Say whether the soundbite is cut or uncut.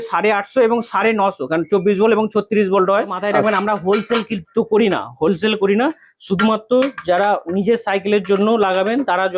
cut